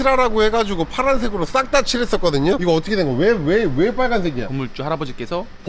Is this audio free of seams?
no; 2 cuts; at 2.6 s, 4.5 s

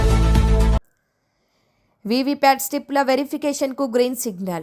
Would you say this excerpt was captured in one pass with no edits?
no; 1 cut; at 1.0 s

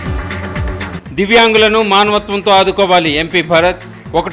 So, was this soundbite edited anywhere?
yes; 1 cut; at 0.9 s

